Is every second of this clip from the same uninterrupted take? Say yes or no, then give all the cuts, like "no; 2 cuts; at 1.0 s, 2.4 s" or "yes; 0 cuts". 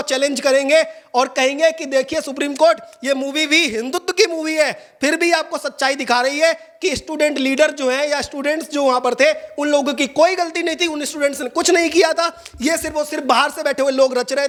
yes; 0 cuts